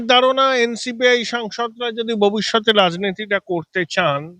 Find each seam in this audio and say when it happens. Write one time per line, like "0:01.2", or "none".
none